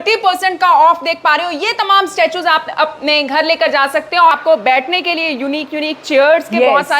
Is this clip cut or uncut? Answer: cut